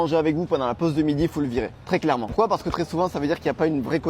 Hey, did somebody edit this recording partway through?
no; 0 cuts

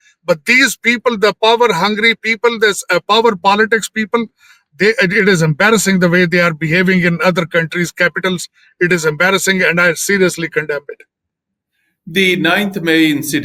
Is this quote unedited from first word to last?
yes; 0 cuts

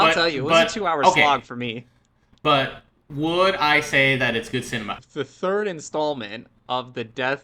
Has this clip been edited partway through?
yes; 1 cut; at 5.0 s

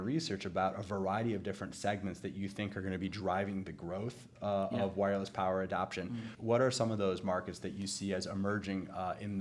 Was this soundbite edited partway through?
no; 0 cuts

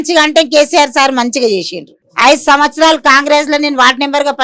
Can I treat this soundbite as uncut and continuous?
no; 1 cut; at 2.0 s

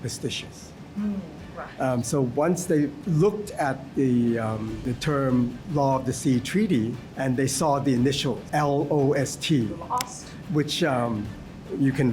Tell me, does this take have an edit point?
yes; 4 cuts; at 3.0 s, 4.8 s, 7.0 s, 8.4 s

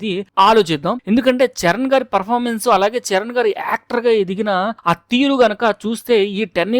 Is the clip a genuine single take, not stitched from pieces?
no; 1 cut; at 1.0 s

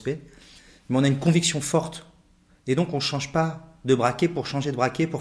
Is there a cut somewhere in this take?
no; 0 cuts

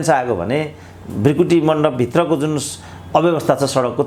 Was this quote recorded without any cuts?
yes; 0 cuts

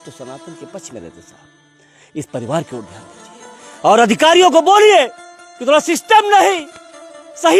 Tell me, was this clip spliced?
no; 0 cuts

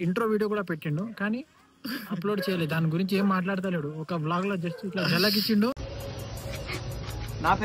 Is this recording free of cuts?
no; 1 cut; at 5.8 s

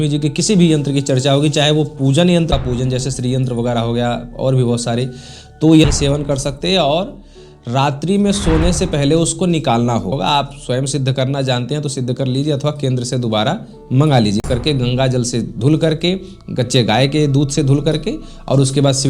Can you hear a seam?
yes; 4 cuts; at 2.5 s, 5.8 s, 10.1 s, 14.4 s

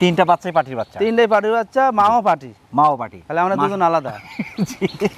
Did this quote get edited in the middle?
no; 0 cuts

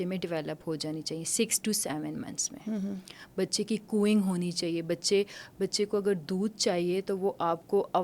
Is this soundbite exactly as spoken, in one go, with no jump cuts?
yes; 0 cuts

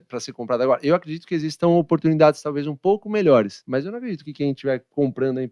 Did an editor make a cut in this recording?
no; 0 cuts

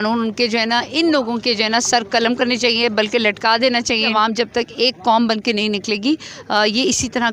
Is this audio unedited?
no; 1 cut; at 4.1 s

